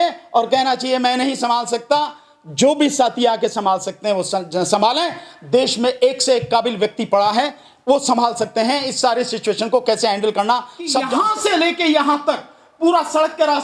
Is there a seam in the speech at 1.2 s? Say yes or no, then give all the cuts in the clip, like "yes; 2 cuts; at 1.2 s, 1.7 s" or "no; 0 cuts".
no; 1 cut; at 11.1 s